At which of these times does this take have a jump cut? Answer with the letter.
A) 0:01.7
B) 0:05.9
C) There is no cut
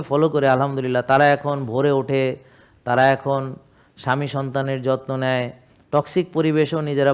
C